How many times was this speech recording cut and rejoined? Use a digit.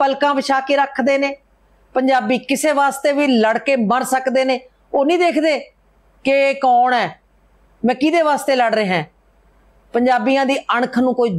0